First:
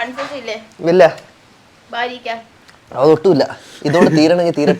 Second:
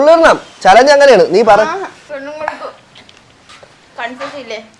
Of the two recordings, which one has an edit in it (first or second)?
second